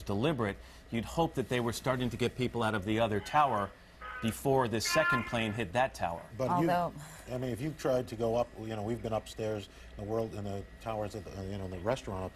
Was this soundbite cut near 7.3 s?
no; 0 cuts

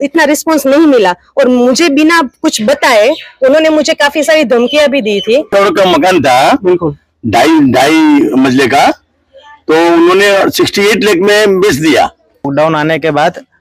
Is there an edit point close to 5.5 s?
yes; 2 cuts; at 5.5 s, 12.5 s

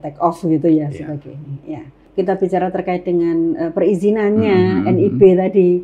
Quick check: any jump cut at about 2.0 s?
yes; 1 cut; at 2.0 s

